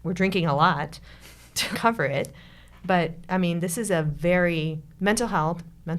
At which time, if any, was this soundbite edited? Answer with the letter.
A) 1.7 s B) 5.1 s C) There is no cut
A